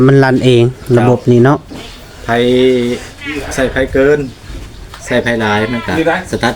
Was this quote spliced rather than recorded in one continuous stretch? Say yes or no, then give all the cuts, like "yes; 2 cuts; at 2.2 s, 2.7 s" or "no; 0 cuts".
no; 0 cuts